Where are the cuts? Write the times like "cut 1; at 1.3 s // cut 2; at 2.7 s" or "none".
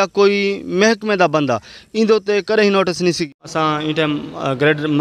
cut 1; at 3.4 s